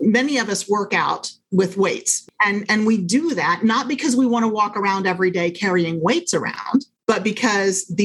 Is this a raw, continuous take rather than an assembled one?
no; 3 cuts; at 1.4 s, 2.2 s, 6.9 s

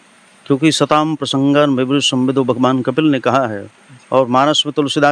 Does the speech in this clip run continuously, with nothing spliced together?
yes; 0 cuts

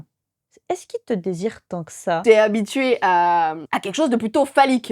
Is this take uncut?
no; 2 cuts; at 2.2 s, 3.7 s

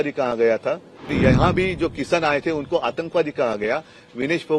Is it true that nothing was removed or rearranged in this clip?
no; 1 cut; at 1.1 s

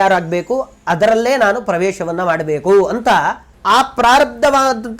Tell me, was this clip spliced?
no; 0 cuts

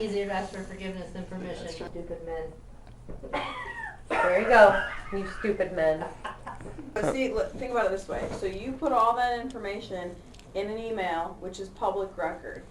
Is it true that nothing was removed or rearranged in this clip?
no; 2 cuts; at 1.9 s, 6.7 s

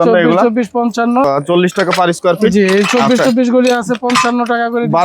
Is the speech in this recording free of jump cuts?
no; 1 cut; at 1.2 s

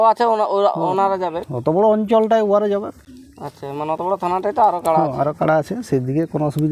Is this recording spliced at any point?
no; 0 cuts

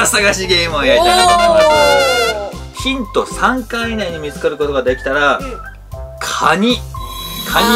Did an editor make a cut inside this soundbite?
yes; 1 cut; at 2.6 s

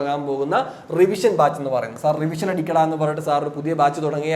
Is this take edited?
no; 0 cuts

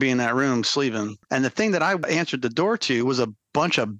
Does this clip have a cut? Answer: yes; 2 cuts; at 1.2 s, 2.0 s

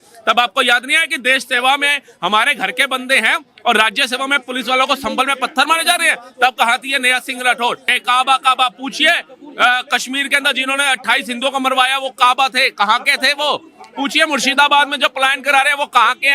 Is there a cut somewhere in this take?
yes; 1 cut; at 7.9 s

